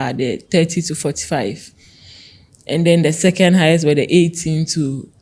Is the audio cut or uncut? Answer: uncut